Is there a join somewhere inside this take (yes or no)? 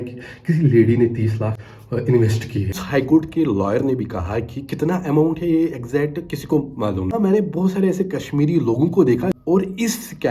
yes